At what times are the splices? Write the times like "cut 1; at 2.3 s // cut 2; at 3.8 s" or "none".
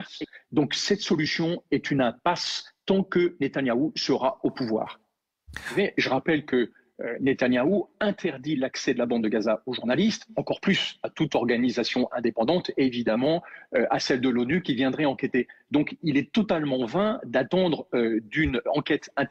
cut 1; at 8.1 s

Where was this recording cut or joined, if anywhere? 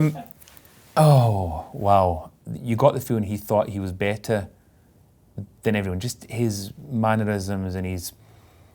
cut 1; at 2.3 s

